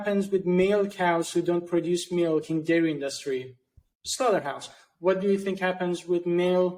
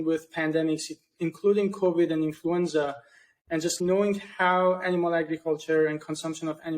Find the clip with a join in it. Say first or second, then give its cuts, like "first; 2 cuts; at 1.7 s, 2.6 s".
second; 1 cut; at 3.8 s